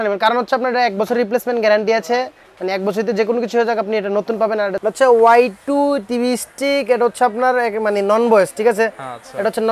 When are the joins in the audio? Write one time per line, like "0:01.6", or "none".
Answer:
0:04.8